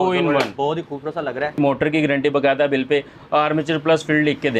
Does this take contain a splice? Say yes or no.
yes